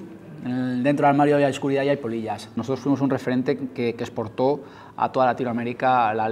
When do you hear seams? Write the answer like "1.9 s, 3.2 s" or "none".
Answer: 2.6 s

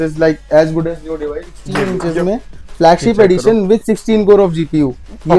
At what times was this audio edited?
1.9 s

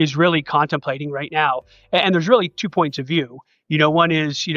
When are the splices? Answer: none

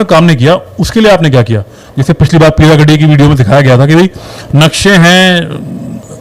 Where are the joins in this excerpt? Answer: 1.8 s

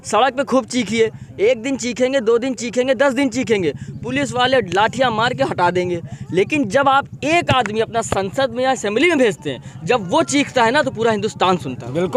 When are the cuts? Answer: none

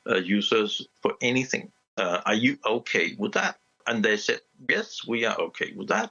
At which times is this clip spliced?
0.9 s, 3.8 s

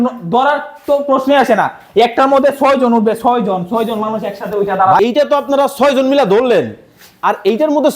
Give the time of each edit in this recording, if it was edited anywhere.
5.0 s

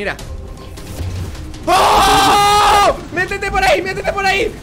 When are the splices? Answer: none

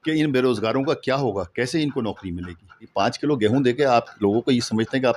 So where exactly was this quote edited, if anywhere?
2.9 s

